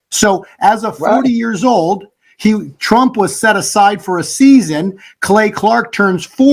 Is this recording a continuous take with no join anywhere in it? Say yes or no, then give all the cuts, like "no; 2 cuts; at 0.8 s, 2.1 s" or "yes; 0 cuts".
yes; 0 cuts